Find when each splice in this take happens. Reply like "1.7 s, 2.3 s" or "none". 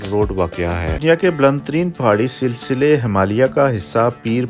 1.0 s